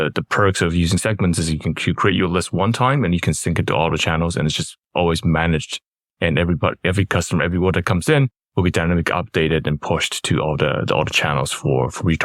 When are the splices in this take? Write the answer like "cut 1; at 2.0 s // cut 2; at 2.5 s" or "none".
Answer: none